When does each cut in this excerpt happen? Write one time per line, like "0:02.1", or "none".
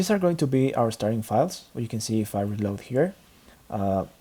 0:00.9